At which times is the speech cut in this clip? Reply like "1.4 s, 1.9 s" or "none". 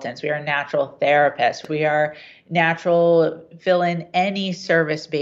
1.6 s